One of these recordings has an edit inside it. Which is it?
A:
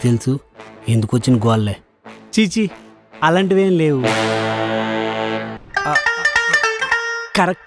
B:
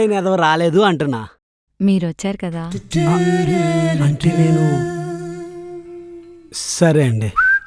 A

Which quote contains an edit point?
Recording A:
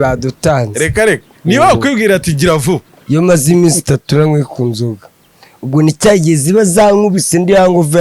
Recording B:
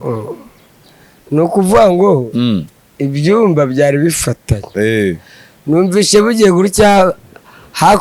A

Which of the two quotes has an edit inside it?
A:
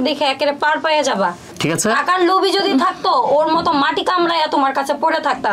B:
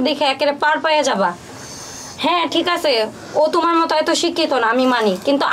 A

